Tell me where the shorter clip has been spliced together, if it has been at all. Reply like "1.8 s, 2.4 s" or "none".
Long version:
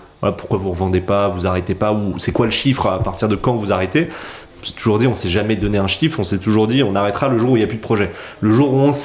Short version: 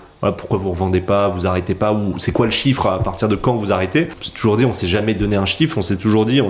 4.2 s

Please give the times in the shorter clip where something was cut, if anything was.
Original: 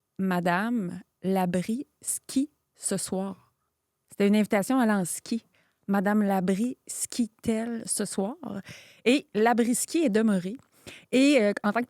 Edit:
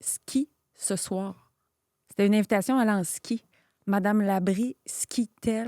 none

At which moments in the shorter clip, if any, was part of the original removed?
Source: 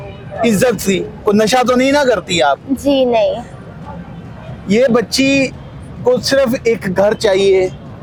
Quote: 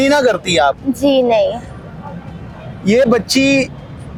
none

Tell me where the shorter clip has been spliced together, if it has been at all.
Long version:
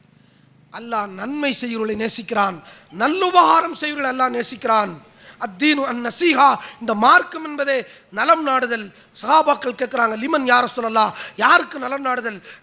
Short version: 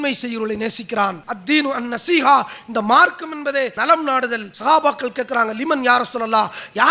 1.3 s, 4.1 s

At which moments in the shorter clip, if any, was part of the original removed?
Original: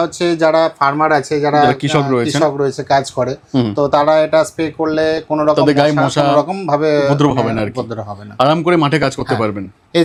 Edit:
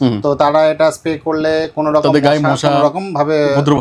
none

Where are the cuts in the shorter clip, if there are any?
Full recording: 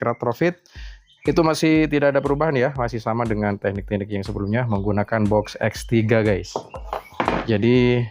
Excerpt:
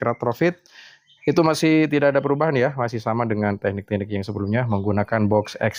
none

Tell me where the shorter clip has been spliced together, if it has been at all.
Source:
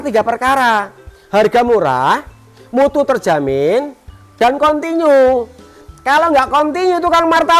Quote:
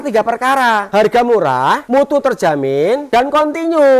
0.8 s, 1.8 s, 3.0 s

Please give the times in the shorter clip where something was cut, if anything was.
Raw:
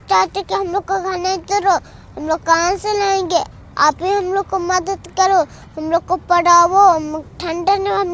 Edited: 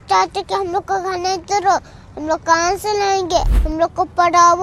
3.6 s

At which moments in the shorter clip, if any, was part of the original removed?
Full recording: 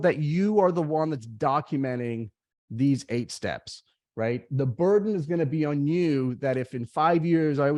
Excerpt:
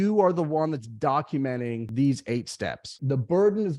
1.8 s, 3.0 s

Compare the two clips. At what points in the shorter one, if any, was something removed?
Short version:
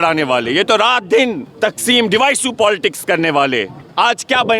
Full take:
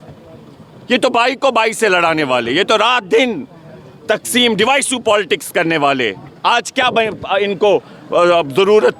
1.5 s

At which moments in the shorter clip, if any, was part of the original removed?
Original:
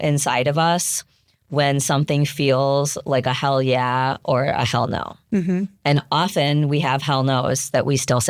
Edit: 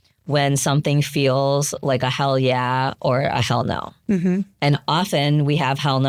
none

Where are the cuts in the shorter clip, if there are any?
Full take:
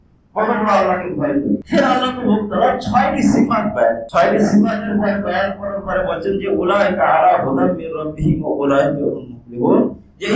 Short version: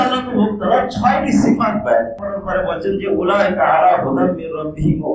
2.1 s

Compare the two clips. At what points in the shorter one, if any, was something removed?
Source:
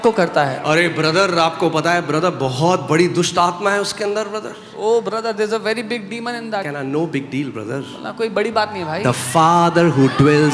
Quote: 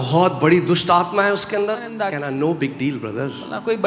1.9 s

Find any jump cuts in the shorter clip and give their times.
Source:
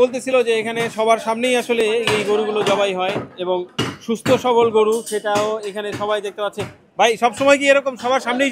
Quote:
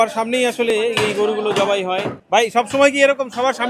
2.2 s

